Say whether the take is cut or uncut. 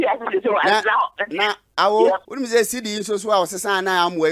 cut